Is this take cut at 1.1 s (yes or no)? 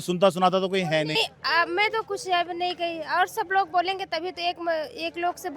yes